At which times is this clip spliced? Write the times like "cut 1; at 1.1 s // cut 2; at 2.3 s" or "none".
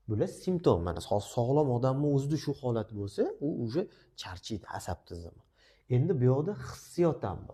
none